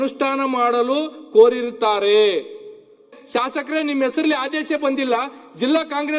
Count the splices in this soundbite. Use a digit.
1